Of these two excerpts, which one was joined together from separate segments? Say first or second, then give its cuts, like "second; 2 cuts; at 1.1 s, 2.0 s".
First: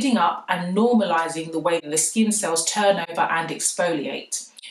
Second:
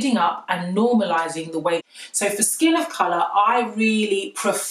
second; 1 cut; at 2.0 s